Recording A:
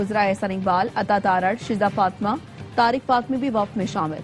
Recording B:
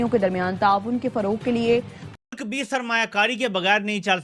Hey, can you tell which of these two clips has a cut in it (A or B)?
B